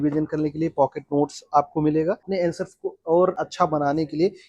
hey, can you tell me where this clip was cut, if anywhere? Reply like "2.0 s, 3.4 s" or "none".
2.3 s, 3.4 s